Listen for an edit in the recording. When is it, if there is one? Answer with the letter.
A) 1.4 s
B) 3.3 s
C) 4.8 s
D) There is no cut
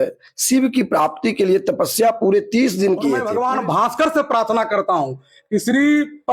B